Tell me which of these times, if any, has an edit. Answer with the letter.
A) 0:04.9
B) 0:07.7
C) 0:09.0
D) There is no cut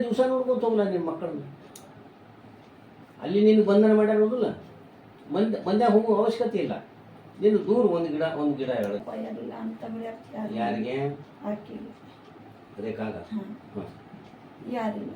C